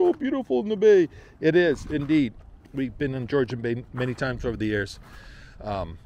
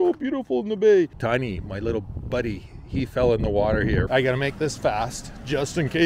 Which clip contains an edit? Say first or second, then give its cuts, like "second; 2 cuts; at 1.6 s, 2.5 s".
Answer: second; 2 cuts; at 1.2 s, 4.1 s